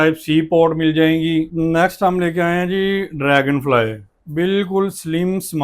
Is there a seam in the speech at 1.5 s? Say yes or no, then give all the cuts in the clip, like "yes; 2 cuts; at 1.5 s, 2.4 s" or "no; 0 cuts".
yes; 1 cut; at 1.5 s